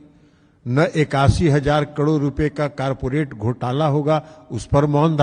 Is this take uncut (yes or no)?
yes